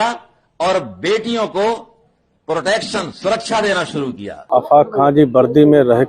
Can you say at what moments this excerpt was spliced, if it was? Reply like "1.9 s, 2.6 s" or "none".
4.3 s